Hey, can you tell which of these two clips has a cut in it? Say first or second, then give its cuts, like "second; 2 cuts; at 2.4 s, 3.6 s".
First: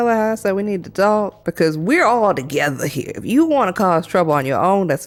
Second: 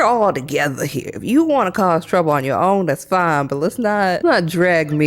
second; 1 cut; at 4.2 s